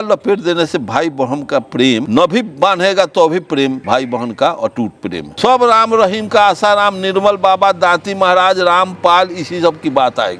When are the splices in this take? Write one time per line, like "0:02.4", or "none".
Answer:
0:02.0
0:03.8
0:05.3